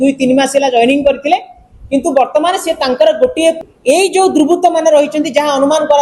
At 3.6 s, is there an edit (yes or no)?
yes